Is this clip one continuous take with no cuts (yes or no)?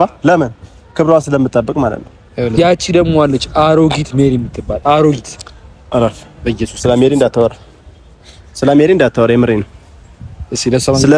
no